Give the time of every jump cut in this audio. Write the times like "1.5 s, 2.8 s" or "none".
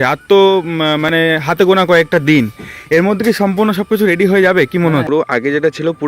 5.1 s